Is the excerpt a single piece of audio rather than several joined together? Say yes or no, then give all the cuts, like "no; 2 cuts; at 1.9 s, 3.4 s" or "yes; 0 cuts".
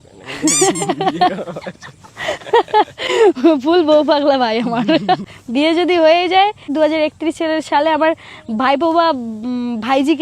no; 2 cuts; at 5.4 s, 6.7 s